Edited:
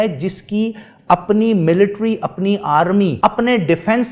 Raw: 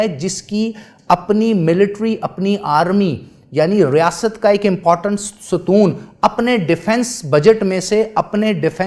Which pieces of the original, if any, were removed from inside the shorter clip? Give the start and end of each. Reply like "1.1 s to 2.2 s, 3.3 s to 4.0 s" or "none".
3.1 s to 6.1 s